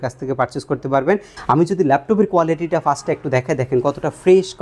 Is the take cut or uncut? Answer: cut